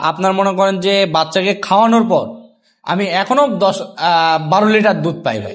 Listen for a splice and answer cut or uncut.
uncut